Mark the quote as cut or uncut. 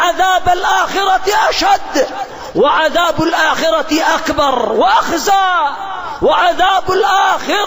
uncut